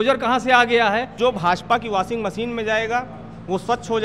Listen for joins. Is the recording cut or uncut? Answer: cut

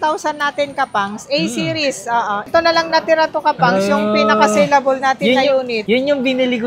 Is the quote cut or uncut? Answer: cut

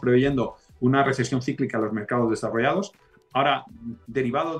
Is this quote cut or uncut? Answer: uncut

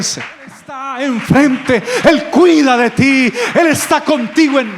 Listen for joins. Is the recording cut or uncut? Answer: cut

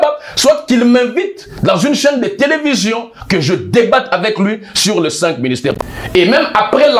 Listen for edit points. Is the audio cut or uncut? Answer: cut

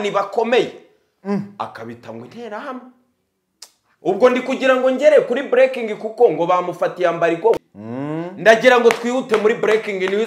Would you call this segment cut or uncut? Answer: cut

